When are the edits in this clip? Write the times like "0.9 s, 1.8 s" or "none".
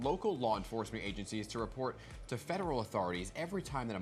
none